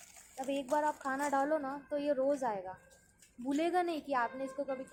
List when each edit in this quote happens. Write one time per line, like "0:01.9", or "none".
none